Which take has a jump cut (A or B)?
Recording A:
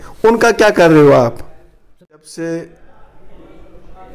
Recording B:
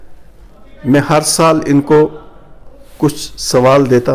A